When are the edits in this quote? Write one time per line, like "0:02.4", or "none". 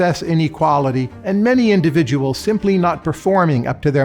0:01.1